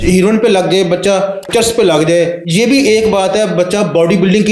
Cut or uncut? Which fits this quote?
cut